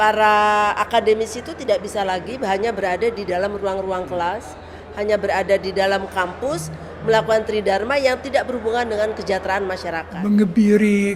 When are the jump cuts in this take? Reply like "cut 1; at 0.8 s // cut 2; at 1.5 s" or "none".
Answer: cut 1; at 10.1 s